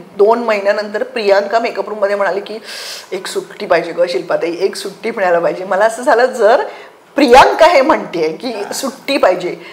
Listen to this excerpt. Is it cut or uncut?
uncut